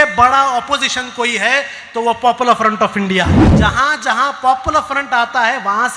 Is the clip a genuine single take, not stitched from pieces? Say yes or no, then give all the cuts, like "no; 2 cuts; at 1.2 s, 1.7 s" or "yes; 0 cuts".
no; 1 cut; at 3.4 s